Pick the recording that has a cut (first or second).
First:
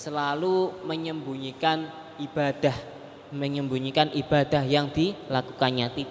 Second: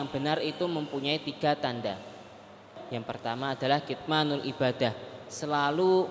second